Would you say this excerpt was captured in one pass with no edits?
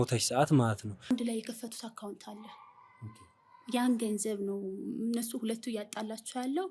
no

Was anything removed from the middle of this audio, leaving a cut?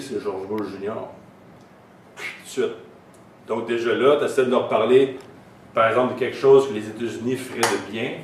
no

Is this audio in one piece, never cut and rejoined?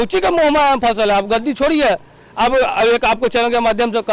yes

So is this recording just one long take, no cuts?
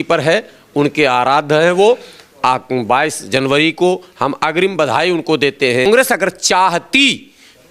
no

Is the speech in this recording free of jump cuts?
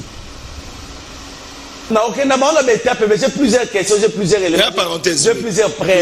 no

